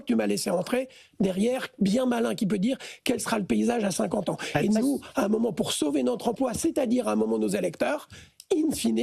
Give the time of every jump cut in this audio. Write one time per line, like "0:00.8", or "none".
none

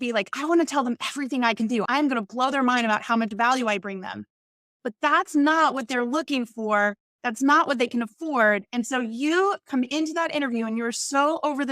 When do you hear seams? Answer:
0:01.9

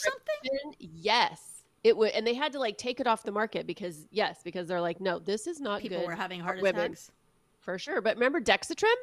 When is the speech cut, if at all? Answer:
none

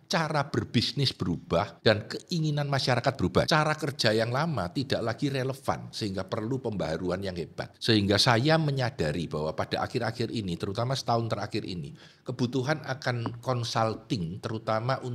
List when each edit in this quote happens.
0:01.7
0:03.5
0:07.6

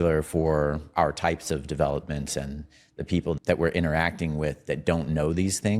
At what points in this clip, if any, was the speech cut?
0:03.4

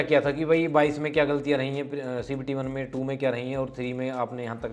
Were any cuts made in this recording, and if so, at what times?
none

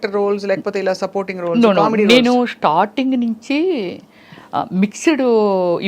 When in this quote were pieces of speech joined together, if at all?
none

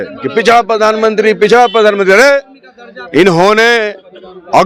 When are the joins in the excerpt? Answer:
none

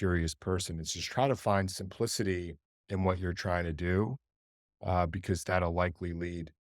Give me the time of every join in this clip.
0:01.4
0:02.7
0:05.5

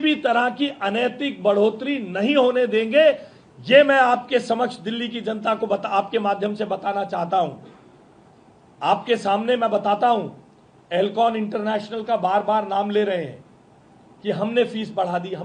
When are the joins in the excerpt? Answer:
none

